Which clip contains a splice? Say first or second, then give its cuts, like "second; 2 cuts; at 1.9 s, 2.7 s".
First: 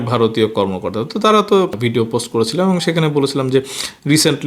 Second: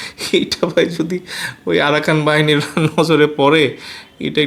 first; 1 cut; at 1.8 s